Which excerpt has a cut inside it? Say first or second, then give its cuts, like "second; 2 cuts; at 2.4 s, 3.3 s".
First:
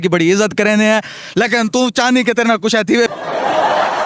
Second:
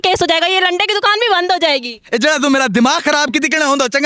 first; 1 cut; at 3.1 s